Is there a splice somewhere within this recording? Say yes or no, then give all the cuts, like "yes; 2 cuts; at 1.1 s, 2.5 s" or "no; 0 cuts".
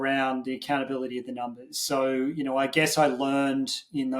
no; 0 cuts